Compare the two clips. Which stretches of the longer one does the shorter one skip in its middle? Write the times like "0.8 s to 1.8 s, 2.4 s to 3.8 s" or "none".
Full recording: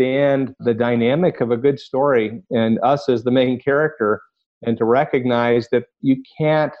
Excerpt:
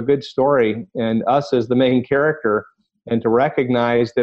none